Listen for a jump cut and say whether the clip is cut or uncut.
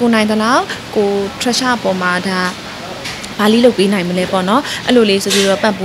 uncut